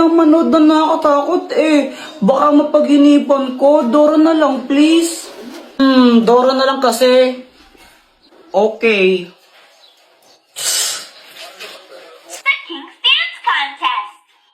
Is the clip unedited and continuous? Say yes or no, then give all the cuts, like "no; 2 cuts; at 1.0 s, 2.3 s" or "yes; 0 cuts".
yes; 0 cuts